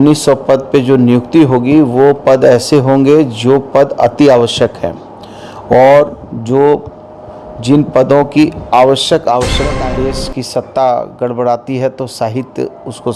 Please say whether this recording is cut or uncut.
cut